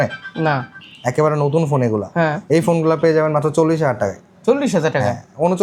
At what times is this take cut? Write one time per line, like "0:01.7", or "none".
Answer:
none

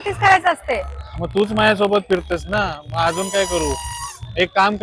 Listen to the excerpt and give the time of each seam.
none

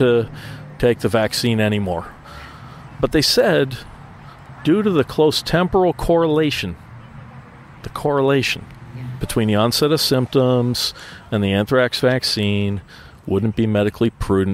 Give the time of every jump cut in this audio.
0:09.2

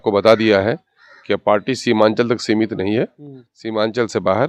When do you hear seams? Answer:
none

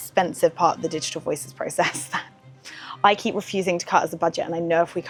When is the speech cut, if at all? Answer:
none

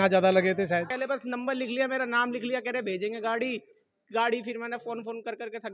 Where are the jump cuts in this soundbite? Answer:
0:00.9

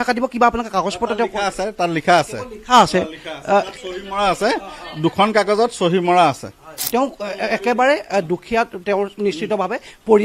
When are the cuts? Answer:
0:06.7

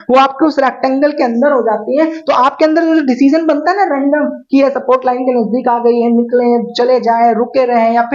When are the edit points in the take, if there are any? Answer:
none

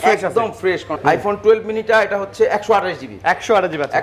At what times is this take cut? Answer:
0:00.9

